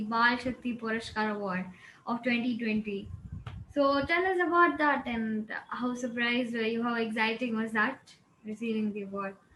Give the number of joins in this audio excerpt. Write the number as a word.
zero